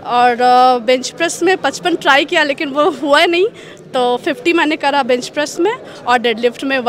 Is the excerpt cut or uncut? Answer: uncut